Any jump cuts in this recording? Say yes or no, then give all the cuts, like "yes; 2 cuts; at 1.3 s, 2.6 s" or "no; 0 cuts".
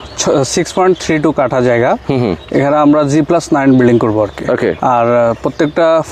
yes; 1 cut; at 4.8 s